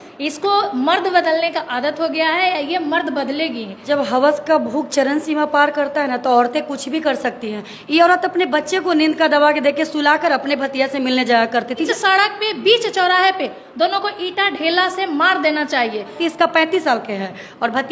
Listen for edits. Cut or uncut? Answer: cut